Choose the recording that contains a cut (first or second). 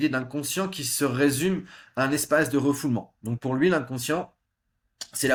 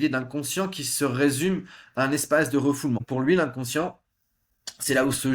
second